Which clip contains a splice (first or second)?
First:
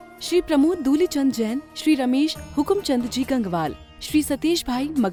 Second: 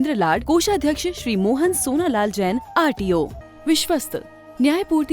second